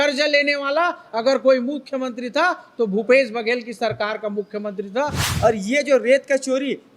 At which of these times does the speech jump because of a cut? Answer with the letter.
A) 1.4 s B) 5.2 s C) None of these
B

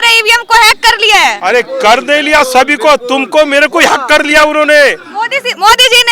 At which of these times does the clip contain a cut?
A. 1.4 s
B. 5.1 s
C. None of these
A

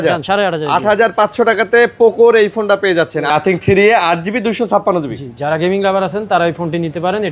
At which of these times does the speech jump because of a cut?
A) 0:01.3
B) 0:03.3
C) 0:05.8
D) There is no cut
B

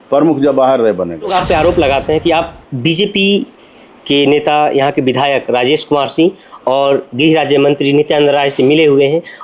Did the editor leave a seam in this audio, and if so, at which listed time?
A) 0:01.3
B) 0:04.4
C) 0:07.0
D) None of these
A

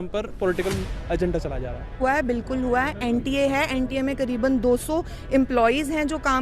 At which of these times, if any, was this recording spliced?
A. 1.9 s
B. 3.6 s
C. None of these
A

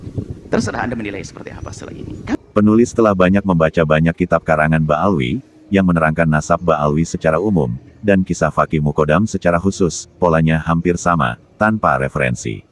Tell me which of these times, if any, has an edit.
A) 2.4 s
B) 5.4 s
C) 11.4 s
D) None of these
A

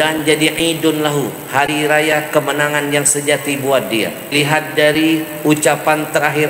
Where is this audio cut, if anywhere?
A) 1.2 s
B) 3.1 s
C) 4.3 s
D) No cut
C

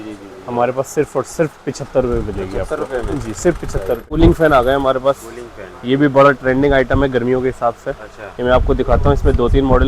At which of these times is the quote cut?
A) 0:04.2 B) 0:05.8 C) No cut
A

